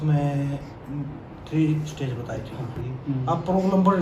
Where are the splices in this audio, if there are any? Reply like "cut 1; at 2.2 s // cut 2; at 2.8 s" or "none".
cut 1; at 2.9 s